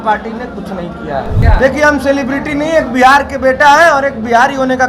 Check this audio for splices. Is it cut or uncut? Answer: cut